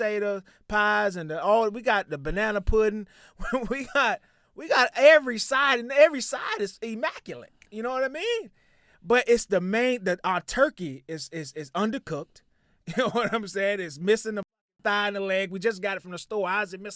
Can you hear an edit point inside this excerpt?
no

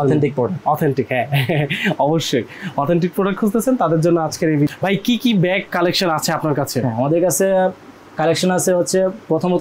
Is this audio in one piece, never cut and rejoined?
no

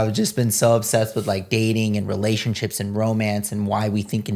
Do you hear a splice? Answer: no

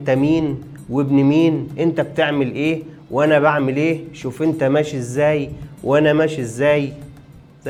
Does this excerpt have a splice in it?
no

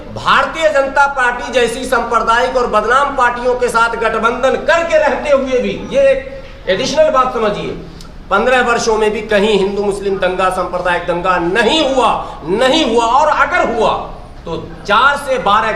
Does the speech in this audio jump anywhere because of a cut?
no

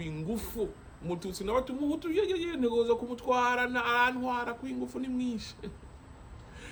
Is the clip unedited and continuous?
yes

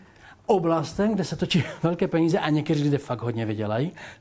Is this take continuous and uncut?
yes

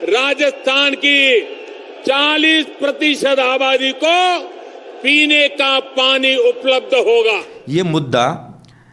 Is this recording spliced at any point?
yes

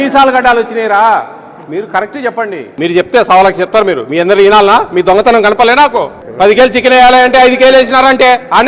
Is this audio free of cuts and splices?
no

